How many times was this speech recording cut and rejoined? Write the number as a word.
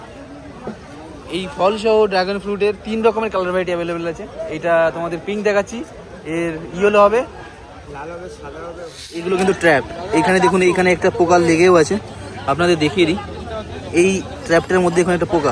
one